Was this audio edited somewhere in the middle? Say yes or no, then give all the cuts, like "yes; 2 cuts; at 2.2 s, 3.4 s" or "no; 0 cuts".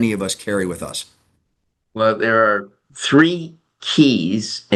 no; 0 cuts